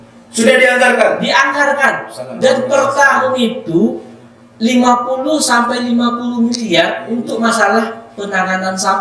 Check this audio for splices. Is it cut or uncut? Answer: uncut